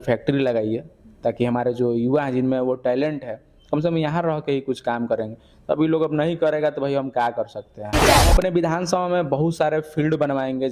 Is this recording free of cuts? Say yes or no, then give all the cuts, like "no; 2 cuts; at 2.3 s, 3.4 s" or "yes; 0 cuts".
no; 1 cut; at 8.1 s